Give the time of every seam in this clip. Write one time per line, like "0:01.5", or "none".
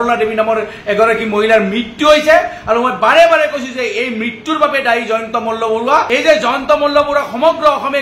0:06.1